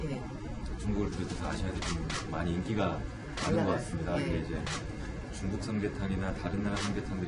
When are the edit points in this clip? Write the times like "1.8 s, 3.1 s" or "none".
none